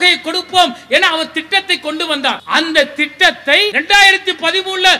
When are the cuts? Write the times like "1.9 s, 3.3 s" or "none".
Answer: 2.4 s, 3.8 s